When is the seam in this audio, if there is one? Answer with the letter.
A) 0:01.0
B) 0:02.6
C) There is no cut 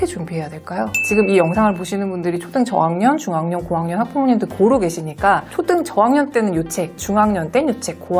A